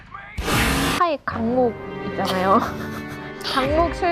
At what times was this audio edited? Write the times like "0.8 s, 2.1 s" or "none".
1.0 s